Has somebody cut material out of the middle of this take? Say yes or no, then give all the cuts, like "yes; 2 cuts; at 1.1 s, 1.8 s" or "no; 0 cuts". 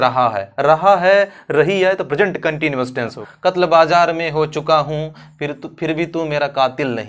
yes; 1 cut; at 3.2 s